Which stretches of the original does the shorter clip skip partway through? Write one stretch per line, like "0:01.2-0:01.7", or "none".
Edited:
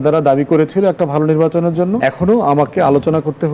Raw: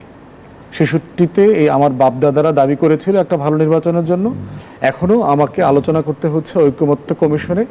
0:04.3-0:04.8